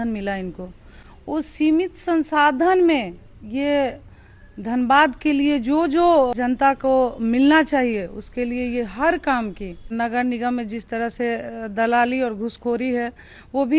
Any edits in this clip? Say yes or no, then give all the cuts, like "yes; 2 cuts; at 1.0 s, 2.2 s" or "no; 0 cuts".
yes; 2 cuts; at 6.3 s, 9.9 s